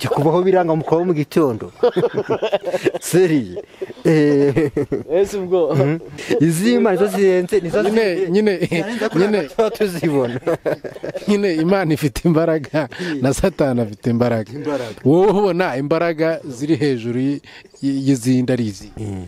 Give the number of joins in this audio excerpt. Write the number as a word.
one